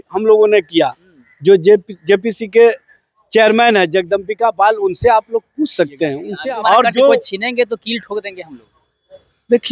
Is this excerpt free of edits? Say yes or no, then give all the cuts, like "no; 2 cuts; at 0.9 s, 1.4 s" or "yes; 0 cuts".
no; 1 cut; at 6.3 s